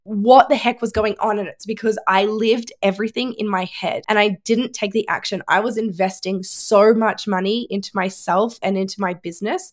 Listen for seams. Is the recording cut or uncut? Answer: cut